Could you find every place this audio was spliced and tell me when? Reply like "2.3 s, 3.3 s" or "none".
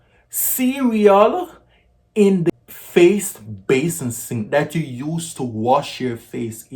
2.3 s